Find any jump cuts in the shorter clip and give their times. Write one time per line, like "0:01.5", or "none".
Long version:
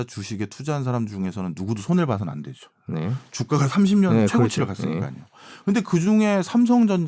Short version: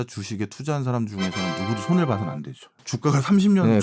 0:02.8